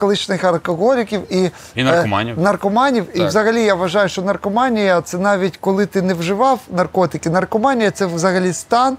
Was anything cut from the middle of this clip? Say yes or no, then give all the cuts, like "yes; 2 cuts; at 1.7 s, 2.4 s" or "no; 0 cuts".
no; 0 cuts